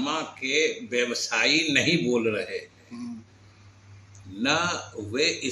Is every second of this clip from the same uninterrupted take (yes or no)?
yes